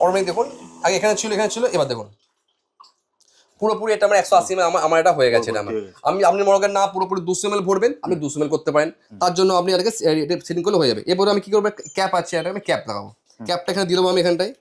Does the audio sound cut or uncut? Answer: uncut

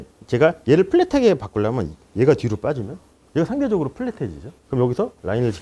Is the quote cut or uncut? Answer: uncut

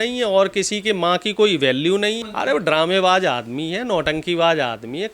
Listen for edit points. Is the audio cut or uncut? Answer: cut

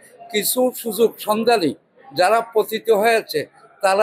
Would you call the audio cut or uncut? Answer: uncut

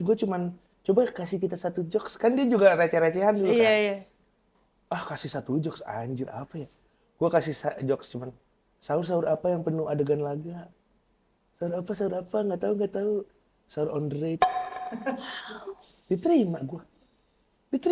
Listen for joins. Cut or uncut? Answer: uncut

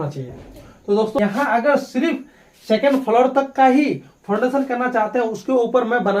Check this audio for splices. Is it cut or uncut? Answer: cut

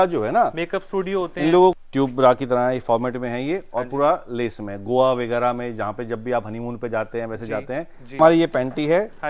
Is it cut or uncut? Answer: cut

